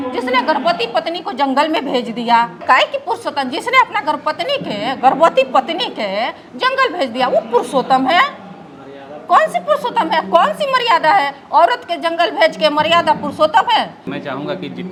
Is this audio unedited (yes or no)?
yes